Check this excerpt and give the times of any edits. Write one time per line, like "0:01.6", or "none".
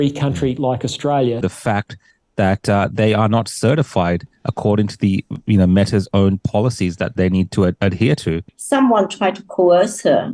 0:01.4
0:08.4